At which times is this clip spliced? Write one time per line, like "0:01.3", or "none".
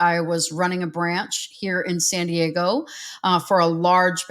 none